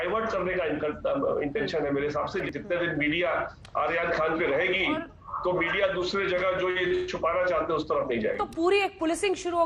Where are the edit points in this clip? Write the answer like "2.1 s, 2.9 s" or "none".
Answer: 2.4 s, 8.4 s